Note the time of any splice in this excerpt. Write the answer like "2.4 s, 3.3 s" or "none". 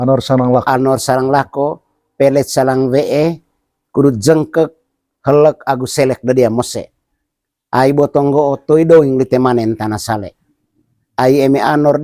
none